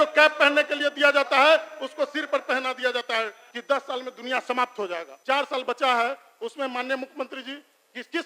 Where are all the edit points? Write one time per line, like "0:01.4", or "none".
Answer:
0:03.4
0:05.1